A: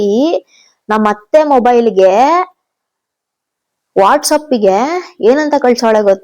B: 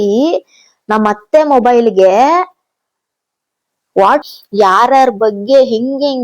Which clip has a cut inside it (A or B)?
B